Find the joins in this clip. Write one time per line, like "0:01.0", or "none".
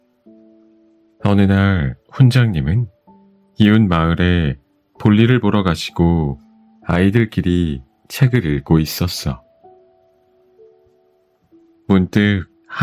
0:00.9